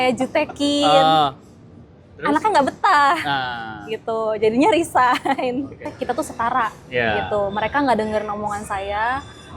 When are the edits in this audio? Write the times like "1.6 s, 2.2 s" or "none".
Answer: 6.0 s